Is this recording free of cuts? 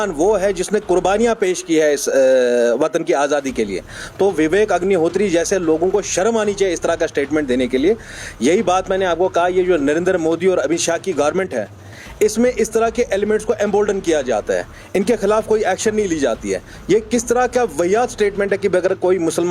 yes; 0 cuts

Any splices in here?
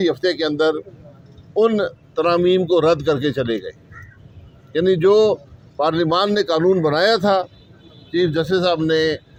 no; 0 cuts

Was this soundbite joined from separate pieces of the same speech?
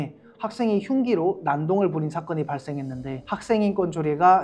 yes; 1 cut; at 3.2 s

